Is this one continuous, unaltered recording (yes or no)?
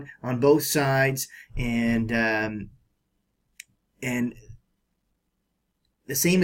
no